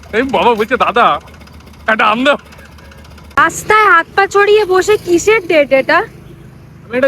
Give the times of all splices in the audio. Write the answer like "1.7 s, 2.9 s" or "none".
3.2 s